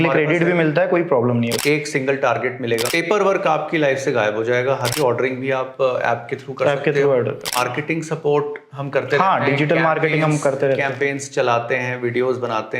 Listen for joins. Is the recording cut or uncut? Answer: cut